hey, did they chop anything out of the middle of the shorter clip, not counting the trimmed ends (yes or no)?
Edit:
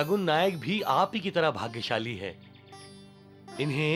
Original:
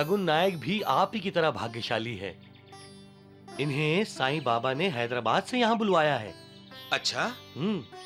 no